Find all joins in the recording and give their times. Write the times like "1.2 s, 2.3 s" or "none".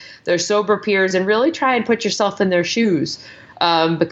none